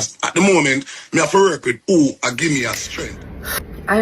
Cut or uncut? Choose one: cut